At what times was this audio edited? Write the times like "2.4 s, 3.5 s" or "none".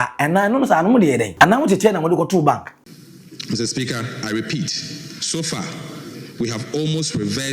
1.3 s, 2.7 s